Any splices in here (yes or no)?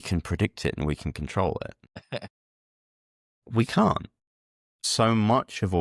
yes